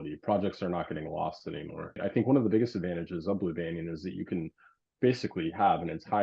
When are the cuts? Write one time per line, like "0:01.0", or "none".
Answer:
0:02.0